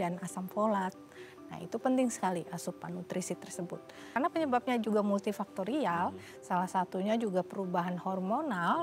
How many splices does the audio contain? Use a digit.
1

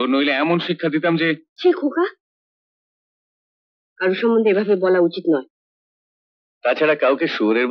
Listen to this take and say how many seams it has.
0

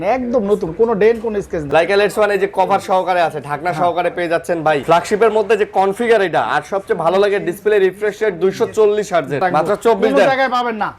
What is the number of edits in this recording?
3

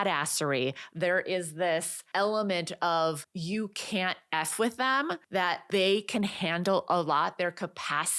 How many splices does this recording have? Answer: 3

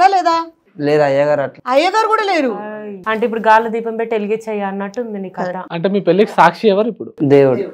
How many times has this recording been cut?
1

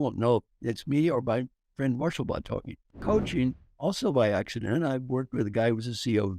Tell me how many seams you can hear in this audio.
1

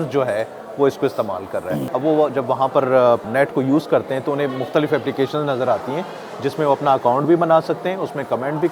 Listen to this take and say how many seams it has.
2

